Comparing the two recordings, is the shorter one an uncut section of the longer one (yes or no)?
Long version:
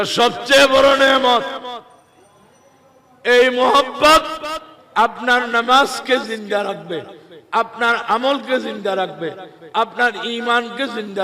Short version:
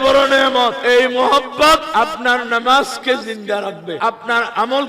no